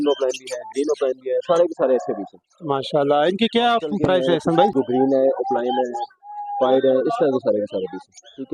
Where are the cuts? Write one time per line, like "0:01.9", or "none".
0:04.7

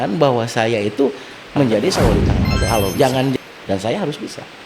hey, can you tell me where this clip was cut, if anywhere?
0:03.4

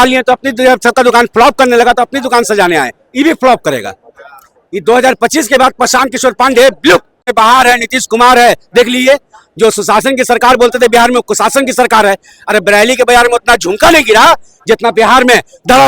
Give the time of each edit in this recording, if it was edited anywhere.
0:07.3

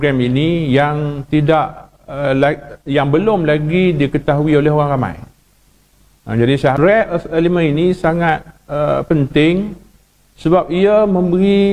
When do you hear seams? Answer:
0:06.8

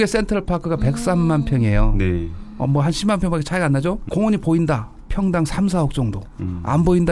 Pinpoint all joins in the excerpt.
0:04.0

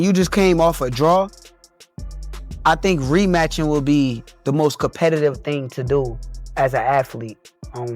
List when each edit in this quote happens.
none

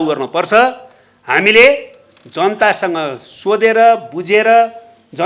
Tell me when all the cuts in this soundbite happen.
none

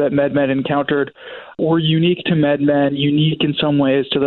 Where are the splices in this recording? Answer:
none

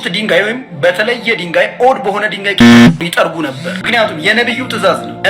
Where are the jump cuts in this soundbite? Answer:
0:03.7

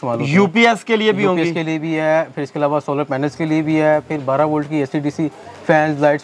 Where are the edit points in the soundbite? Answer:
none

